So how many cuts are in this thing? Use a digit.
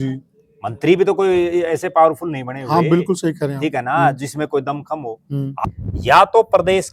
1